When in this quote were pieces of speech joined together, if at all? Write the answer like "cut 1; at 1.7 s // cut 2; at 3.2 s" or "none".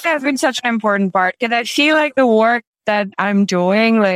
cut 1; at 3.1 s